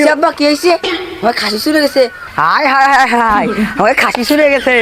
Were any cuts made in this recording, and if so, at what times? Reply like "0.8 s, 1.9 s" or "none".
none